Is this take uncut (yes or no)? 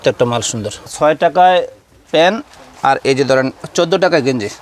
no